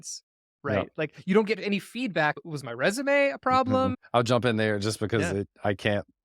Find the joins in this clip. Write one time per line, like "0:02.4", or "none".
0:02.3
0:04.0